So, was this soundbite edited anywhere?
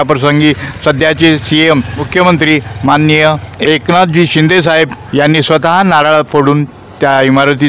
yes; 3 cuts; at 2.0 s, 3.5 s, 5.0 s

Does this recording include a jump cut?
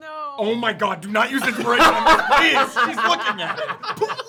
no; 0 cuts

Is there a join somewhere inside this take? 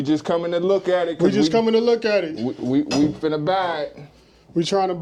no; 0 cuts

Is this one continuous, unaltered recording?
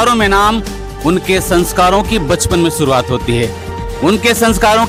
yes; 0 cuts

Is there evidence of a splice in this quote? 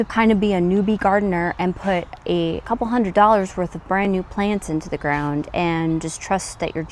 no; 0 cuts

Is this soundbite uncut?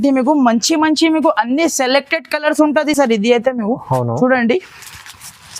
yes; 0 cuts

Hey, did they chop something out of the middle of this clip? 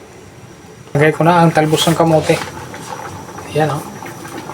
yes; 1 cut; at 1.0 s

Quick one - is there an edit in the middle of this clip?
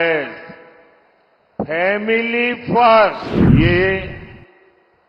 yes; 1 cut; at 3.3 s

